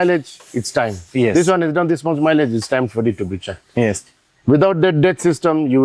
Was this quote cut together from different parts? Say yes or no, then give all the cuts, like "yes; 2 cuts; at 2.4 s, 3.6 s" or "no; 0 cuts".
no; 0 cuts